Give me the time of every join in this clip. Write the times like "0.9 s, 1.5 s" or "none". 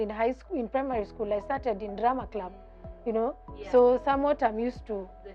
none